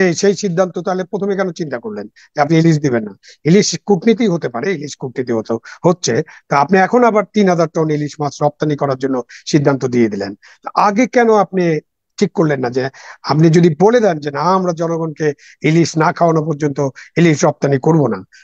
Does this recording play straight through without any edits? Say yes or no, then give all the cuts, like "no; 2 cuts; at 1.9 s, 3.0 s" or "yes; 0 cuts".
yes; 0 cuts